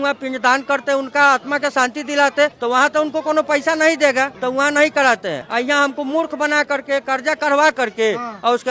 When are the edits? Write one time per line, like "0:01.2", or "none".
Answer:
none